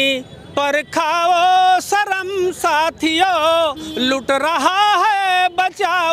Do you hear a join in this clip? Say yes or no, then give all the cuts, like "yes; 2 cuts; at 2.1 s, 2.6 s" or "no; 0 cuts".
no; 0 cuts